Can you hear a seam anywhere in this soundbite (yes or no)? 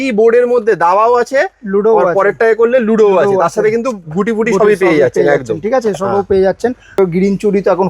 yes